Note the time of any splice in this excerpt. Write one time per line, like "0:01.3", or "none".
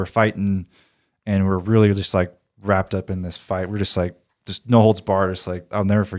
none